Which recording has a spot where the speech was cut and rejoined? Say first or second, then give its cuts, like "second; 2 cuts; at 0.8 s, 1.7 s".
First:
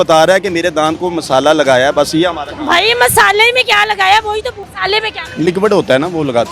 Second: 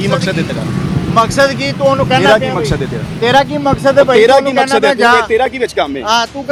first; 1 cut; at 4.6 s